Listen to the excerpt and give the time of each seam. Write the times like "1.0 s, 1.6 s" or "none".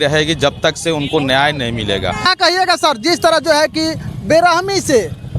2.3 s